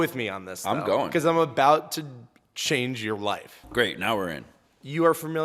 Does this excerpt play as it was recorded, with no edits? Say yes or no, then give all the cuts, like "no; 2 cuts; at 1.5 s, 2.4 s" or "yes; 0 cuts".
no; 1 cut; at 3.6 s